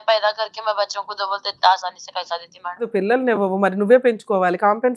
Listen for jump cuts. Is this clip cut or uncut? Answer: cut